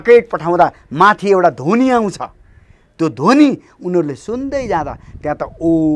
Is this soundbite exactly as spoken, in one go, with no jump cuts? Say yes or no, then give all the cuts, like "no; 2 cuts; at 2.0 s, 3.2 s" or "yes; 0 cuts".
yes; 0 cuts